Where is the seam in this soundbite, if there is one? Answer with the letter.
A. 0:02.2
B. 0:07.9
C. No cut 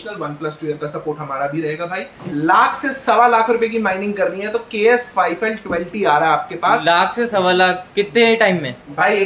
A